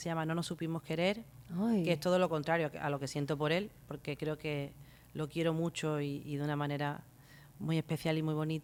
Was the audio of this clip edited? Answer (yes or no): no